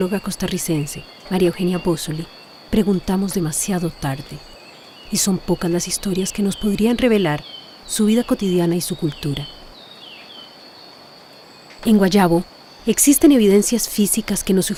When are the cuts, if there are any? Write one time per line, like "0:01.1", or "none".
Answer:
none